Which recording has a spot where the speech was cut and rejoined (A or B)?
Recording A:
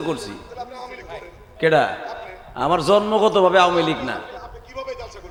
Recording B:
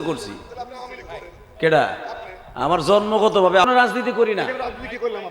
B